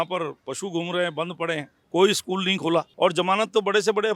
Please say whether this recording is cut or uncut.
cut